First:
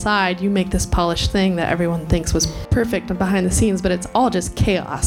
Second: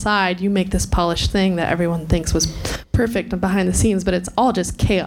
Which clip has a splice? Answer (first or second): first